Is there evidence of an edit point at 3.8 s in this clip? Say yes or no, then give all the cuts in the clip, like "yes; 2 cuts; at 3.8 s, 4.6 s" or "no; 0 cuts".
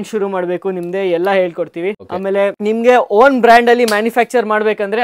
no; 1 cut; at 2.1 s